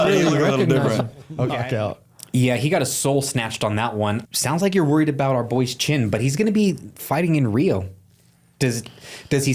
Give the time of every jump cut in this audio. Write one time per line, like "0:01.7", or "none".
0:01.6
0:04.2